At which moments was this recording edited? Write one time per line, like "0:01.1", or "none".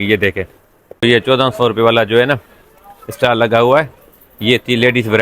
0:01.0